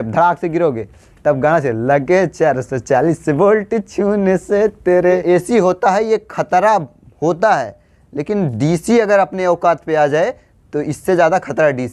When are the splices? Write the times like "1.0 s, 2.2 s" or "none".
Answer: 5.2 s